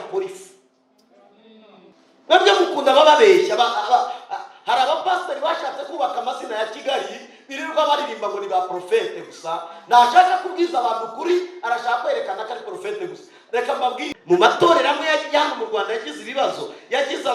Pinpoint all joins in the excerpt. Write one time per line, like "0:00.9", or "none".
0:01.9
0:14.1